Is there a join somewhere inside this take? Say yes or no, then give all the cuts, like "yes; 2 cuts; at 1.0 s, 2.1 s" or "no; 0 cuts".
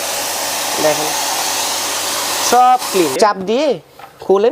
yes; 1 cut; at 3.1 s